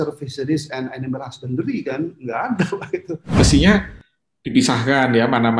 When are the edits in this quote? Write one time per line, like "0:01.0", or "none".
0:03.4